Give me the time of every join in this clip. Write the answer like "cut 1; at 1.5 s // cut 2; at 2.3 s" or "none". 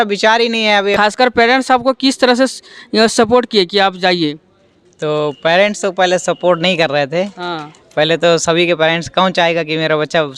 cut 1; at 0.9 s